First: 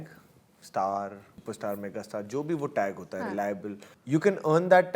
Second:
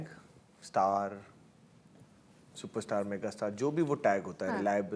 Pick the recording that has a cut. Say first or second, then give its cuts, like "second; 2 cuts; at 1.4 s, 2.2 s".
first; 2 cuts; at 1.3 s, 3.9 s